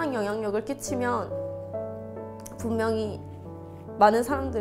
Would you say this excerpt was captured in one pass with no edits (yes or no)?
yes